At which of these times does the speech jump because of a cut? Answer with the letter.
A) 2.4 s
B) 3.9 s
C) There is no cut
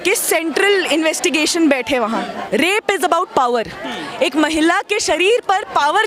A